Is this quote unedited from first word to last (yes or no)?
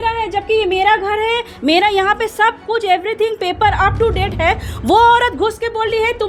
yes